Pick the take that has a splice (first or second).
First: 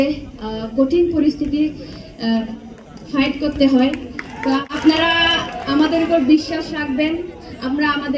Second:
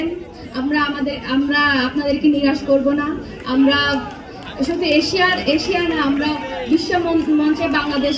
first